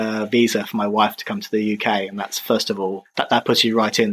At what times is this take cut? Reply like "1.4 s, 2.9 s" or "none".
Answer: none